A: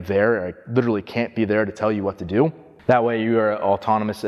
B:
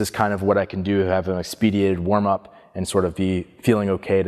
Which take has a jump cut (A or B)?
A